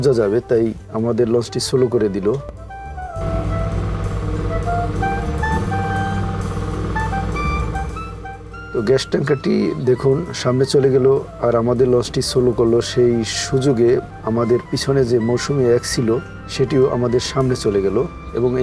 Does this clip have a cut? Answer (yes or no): no